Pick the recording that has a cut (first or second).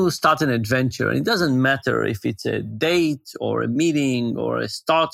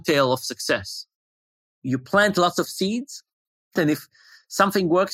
second